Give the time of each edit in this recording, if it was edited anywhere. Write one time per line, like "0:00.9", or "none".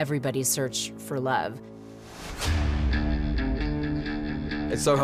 0:03.1